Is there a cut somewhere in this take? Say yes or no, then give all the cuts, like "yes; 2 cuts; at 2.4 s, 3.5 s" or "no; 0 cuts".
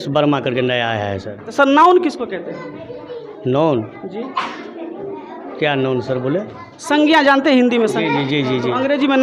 yes; 2 cuts; at 1.5 s, 5.5 s